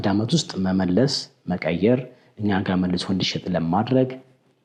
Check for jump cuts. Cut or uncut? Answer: uncut